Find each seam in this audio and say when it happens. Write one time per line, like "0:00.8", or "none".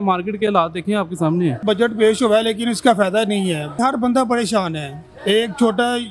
0:01.6
0:03.8

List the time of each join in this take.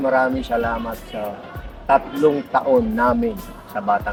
none

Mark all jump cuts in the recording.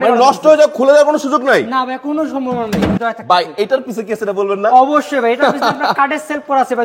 0:03.0

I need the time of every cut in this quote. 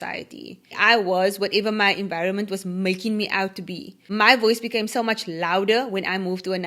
0:00.8
0:04.0

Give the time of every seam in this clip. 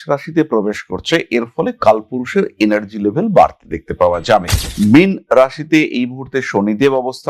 0:04.5

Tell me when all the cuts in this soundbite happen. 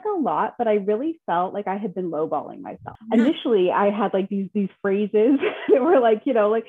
0:02.9

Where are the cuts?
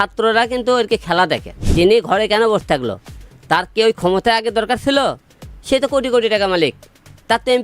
0:01.6

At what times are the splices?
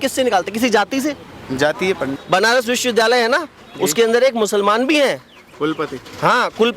0:02.1

